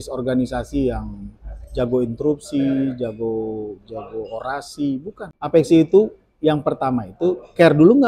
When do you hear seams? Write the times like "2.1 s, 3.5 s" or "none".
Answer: 5.3 s

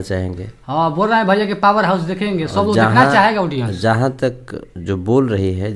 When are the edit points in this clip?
none

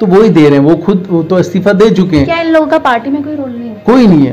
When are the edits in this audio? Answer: none

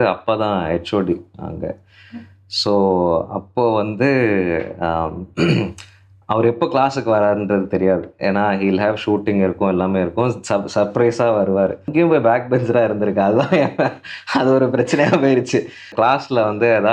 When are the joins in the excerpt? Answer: 11.9 s, 15.9 s

